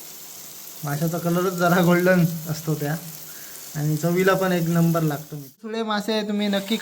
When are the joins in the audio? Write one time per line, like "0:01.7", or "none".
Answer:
0:05.8